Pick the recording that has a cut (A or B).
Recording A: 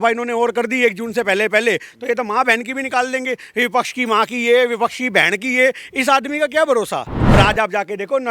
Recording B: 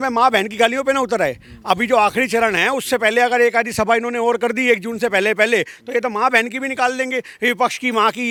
A